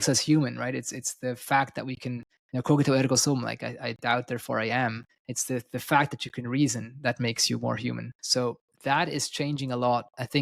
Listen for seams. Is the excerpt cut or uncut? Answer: uncut